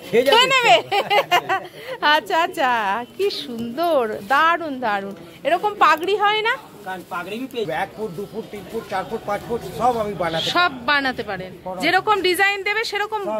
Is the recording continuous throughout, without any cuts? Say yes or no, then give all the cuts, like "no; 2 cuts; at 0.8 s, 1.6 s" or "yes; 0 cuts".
no; 1 cut; at 7.7 s